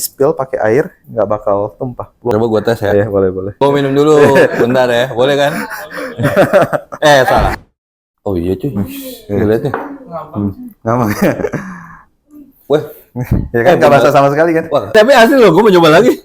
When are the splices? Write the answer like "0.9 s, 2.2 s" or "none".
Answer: 2.3 s, 3.6 s, 7.6 s, 14.9 s